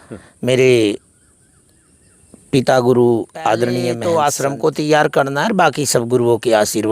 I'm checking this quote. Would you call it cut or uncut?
cut